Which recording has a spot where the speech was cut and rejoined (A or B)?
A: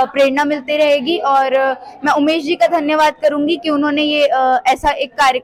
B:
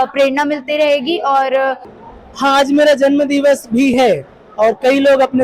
B